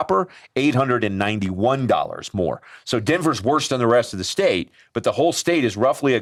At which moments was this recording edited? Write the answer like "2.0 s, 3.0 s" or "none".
none